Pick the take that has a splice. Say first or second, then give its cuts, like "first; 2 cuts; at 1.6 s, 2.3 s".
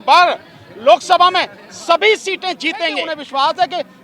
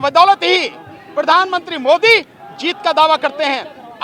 first; 1 cut; at 3.1 s